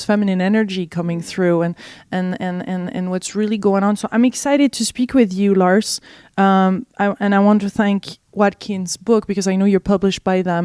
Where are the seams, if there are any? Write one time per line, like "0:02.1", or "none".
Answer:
0:01.0

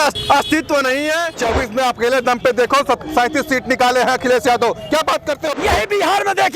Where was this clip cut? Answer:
0:01.4
0:05.5

